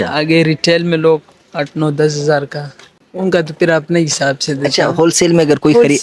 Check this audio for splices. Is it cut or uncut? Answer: uncut